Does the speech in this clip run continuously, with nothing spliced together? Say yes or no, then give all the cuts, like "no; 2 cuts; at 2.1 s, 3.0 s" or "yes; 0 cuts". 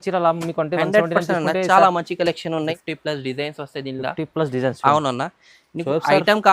no; 1 cut; at 2.8 s